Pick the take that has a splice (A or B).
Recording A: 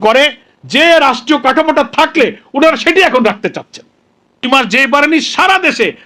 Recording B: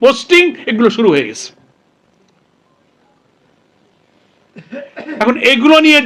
A